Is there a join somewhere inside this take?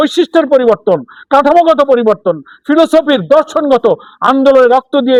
no; 0 cuts

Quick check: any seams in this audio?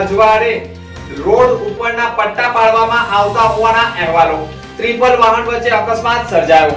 no; 0 cuts

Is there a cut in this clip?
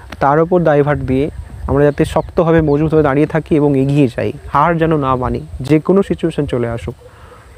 no; 0 cuts

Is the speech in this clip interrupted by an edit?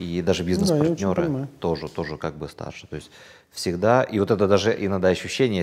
no; 0 cuts

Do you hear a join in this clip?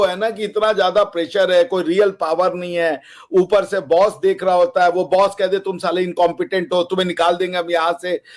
no; 0 cuts

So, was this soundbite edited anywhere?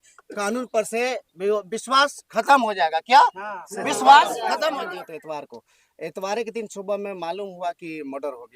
yes; 1 cut; at 4.9 s

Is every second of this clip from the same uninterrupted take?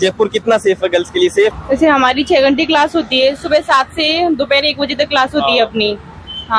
no; 1 cut; at 1.5 s

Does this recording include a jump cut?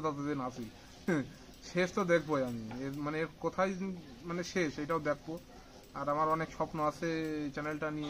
no; 0 cuts

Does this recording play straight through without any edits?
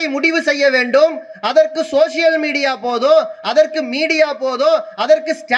yes; 0 cuts

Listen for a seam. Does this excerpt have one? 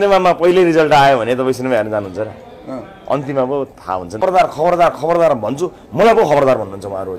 yes; 1 cut; at 4.2 s

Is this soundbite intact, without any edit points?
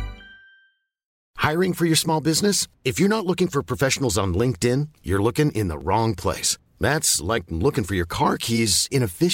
no; 1 cut; at 1.2 s

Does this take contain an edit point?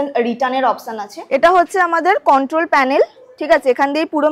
yes; 1 cut; at 1.1 s

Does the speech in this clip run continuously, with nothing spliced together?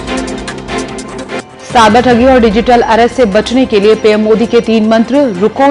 yes; 0 cuts

